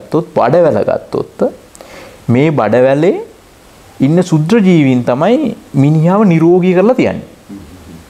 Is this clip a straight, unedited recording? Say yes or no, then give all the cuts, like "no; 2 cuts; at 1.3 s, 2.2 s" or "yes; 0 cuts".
yes; 0 cuts